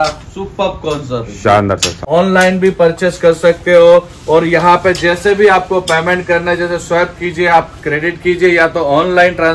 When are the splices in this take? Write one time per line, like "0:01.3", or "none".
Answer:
0:01.9